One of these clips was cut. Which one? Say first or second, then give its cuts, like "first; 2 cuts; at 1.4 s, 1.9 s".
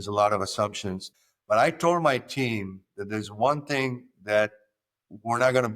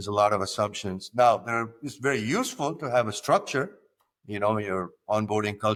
first; 1 cut; at 1.0 s